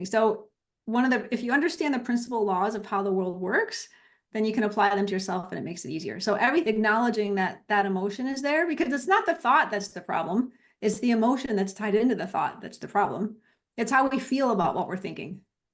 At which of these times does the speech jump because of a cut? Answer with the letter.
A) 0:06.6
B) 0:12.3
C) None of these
A